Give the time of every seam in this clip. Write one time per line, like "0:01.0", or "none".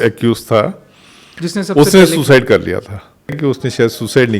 0:03.4